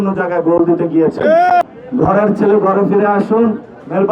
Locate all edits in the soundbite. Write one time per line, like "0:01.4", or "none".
0:01.8